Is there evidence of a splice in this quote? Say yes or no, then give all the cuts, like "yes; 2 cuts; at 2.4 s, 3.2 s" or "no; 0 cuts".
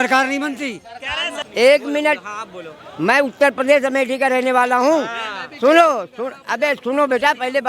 yes; 1 cut; at 1.3 s